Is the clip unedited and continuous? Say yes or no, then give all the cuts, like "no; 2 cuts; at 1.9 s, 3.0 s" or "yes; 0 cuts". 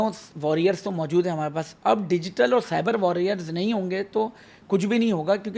yes; 0 cuts